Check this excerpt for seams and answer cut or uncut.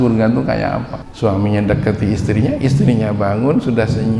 cut